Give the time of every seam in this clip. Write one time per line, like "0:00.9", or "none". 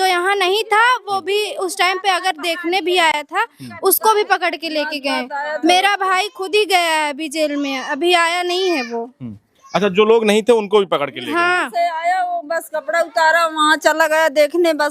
none